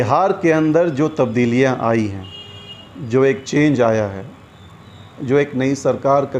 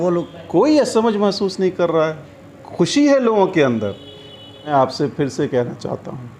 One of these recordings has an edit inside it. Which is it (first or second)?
second